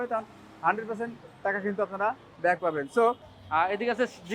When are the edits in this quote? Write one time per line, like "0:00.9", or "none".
0:03.3